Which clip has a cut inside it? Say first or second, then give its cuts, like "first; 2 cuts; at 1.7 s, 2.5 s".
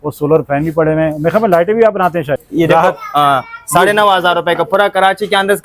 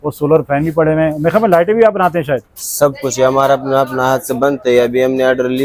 first; 1 cut; at 2.4 s